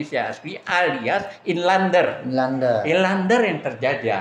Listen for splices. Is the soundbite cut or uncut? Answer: uncut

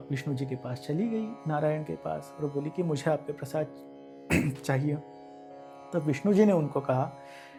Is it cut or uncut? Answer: uncut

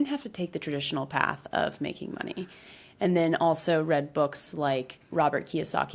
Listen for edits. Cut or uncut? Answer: uncut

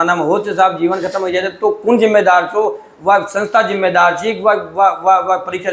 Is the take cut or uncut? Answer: uncut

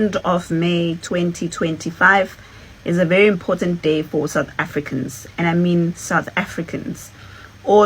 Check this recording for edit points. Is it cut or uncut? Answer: uncut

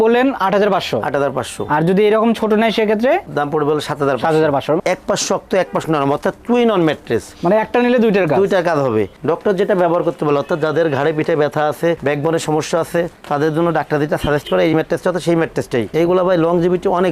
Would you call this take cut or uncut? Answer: cut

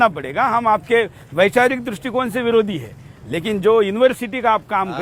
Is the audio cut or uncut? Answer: uncut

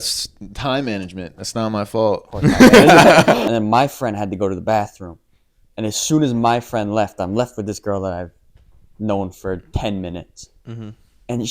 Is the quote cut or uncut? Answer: cut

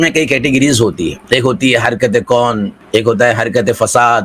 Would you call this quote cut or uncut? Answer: cut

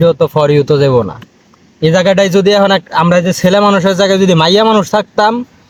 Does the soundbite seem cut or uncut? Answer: uncut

